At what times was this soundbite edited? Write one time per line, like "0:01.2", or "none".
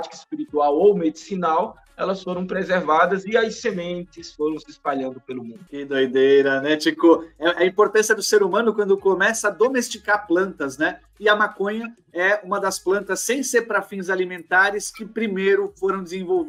none